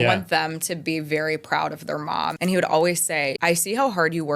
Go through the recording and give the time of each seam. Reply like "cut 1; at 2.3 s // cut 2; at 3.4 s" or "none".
cut 1; at 2.3 s // cut 2; at 3.4 s